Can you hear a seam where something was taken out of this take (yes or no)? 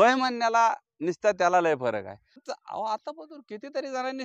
yes